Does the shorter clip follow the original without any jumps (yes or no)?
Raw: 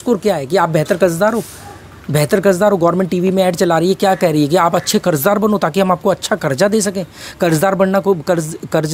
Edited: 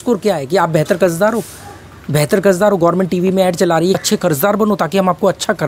no